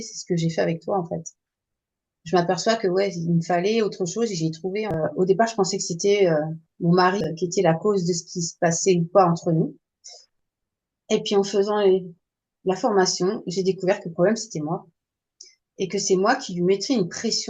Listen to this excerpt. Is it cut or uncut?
cut